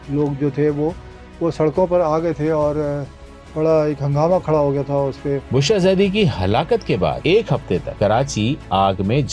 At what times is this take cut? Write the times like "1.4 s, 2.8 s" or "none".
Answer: 5.4 s